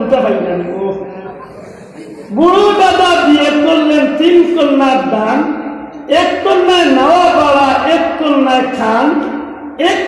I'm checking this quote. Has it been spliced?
no; 0 cuts

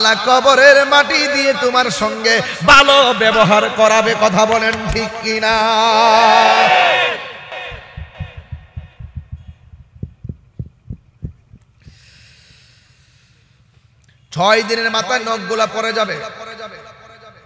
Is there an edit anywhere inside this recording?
no; 0 cuts

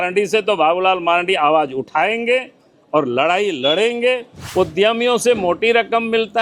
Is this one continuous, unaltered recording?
no; 1 cut; at 4.4 s

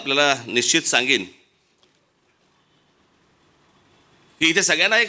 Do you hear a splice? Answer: no; 0 cuts

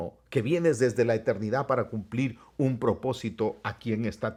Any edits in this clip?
no; 0 cuts

